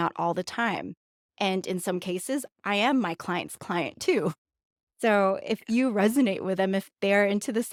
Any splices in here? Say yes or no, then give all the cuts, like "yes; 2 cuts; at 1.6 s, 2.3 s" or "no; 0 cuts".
no; 0 cuts